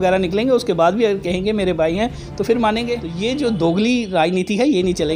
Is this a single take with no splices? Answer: no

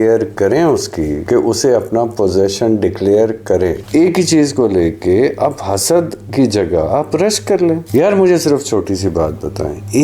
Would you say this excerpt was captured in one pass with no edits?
no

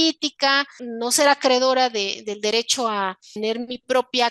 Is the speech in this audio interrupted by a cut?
yes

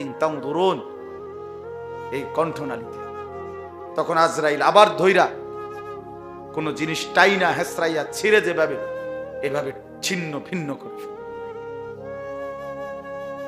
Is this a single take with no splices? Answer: no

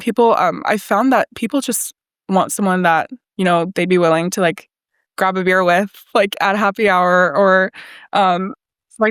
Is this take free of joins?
yes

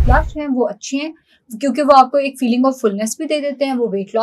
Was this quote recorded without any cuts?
yes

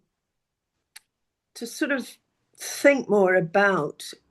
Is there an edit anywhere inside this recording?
no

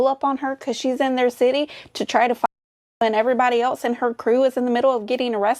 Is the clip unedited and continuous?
yes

